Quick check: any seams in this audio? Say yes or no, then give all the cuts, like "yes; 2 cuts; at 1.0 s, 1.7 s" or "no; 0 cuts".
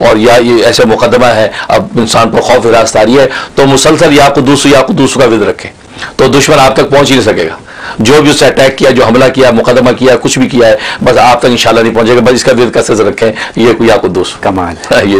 no; 0 cuts